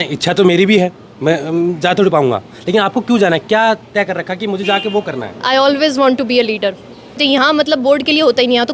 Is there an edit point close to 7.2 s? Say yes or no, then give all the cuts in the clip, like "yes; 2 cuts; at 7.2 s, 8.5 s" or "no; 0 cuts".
yes; 1 cut; at 7.2 s